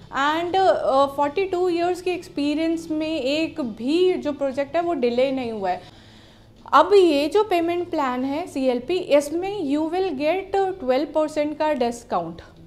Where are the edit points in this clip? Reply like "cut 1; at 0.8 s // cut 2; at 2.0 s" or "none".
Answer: cut 1; at 5.9 s